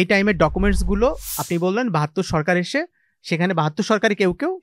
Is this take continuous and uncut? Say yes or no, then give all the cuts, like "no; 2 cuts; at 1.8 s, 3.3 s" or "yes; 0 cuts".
yes; 0 cuts